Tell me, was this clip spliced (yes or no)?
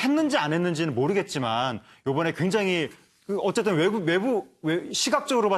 yes